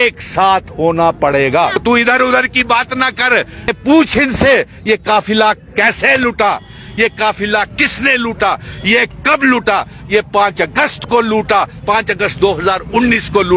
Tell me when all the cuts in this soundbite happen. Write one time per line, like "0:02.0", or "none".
0:01.8
0:03.7